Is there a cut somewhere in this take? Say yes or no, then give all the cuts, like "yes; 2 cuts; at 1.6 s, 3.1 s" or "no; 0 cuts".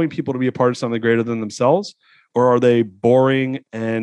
no; 0 cuts